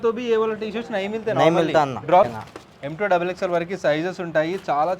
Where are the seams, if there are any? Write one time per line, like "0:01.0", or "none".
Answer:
0:02.5